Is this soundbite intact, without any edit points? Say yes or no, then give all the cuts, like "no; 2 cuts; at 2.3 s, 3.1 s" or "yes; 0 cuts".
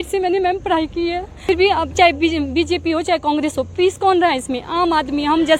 no; 1 cut; at 1.3 s